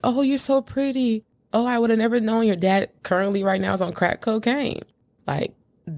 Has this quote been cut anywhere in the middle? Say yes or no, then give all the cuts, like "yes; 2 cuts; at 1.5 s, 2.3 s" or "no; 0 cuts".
no; 0 cuts